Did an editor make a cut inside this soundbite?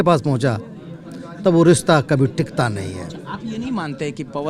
no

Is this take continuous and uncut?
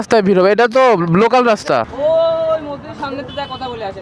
no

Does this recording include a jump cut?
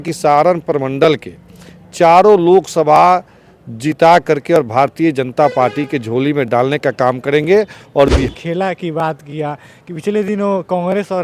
yes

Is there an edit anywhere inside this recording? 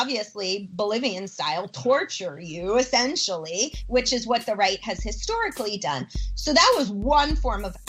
no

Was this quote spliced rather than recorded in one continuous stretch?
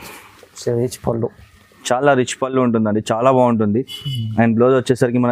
no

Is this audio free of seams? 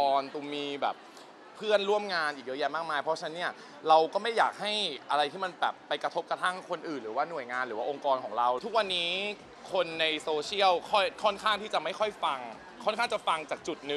no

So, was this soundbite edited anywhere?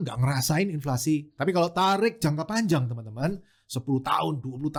no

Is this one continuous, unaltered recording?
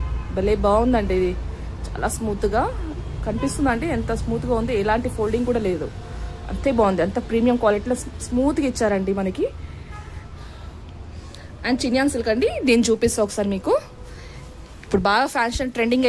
yes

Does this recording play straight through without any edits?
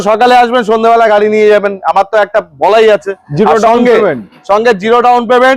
yes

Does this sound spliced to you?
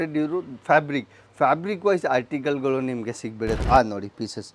yes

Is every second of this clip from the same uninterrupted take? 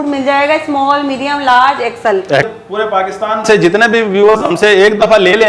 no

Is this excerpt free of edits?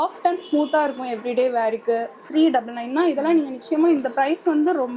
no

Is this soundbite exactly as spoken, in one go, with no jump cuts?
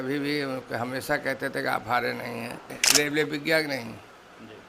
no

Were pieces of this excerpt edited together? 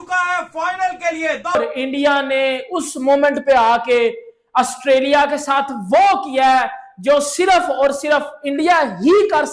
yes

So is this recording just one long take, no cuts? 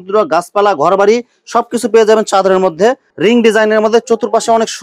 no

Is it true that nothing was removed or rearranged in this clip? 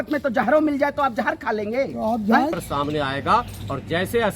no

